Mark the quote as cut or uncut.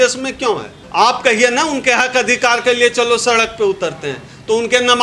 uncut